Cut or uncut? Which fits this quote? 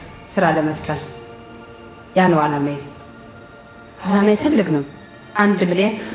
cut